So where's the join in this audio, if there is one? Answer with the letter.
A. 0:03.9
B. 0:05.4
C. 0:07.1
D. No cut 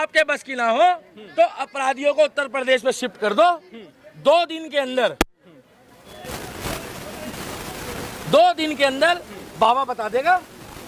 D